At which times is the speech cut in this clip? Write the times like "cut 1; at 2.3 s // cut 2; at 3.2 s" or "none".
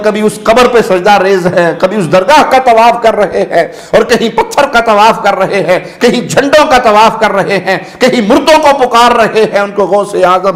none